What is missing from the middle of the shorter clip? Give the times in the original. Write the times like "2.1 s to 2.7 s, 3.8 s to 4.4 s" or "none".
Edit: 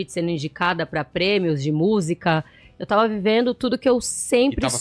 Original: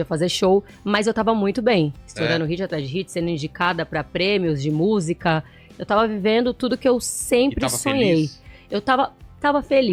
none